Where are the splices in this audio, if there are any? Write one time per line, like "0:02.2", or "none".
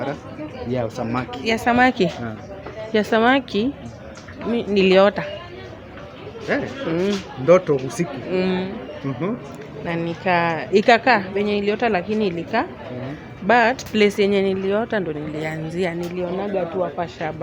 none